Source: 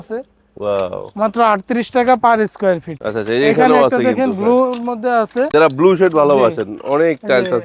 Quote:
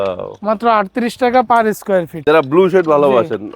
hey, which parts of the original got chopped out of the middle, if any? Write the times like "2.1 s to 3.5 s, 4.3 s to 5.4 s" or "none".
2.9 s to 5.5 s